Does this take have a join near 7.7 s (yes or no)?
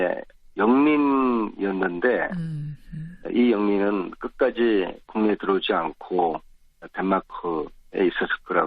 no